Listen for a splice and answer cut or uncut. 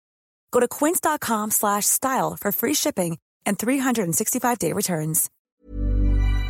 cut